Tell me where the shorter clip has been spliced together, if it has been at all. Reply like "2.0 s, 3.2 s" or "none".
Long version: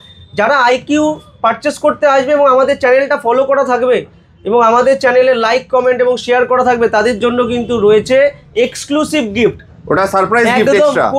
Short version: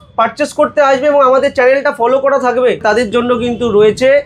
2.8 s